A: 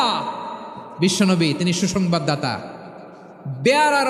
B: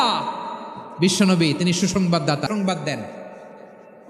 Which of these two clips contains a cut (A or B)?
B